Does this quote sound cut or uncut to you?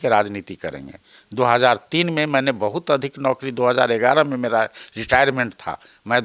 uncut